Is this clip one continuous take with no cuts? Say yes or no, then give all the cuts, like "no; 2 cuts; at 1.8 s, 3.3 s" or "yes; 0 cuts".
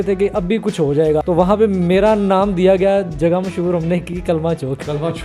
no; 1 cut; at 1.2 s